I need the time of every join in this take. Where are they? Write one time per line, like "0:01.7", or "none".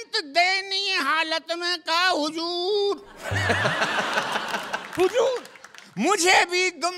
none